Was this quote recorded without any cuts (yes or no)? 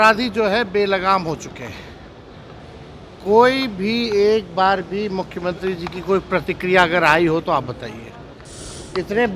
yes